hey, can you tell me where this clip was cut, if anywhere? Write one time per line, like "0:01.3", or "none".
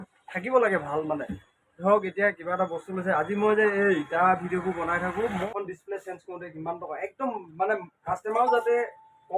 0:05.5